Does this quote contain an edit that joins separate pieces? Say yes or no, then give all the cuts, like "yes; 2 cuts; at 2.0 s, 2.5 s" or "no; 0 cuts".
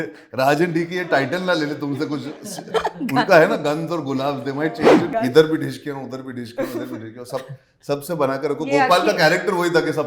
yes; 1 cut; at 5.1 s